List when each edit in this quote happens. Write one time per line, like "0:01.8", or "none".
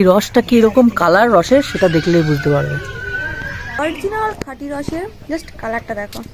0:03.7